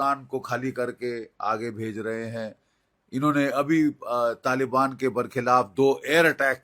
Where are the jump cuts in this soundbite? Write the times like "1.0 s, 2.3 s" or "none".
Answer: none